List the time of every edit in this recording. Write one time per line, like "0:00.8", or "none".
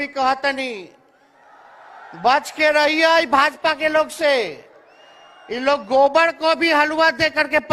none